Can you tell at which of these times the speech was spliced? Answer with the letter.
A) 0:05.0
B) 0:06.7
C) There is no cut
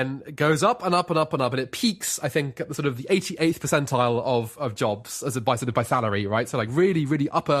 C